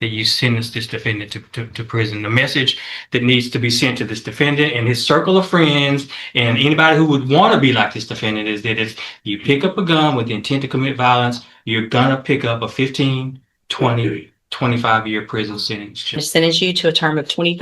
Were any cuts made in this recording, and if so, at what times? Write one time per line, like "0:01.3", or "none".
0:16.2